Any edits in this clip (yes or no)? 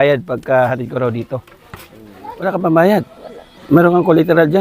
yes